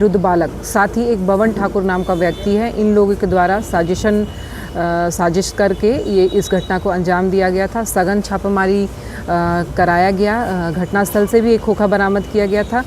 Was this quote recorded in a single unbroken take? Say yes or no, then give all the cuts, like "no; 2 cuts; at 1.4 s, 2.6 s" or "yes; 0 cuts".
yes; 0 cuts